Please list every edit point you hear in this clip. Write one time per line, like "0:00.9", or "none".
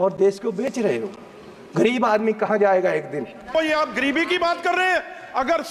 0:03.5